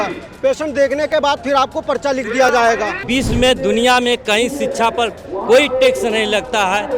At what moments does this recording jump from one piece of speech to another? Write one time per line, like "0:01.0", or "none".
0:03.0